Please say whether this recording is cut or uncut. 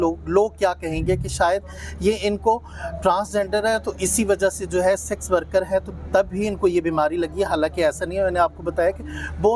uncut